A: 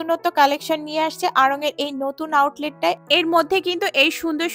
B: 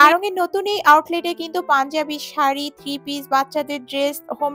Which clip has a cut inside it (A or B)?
A